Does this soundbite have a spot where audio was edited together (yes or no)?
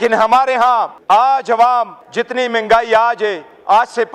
yes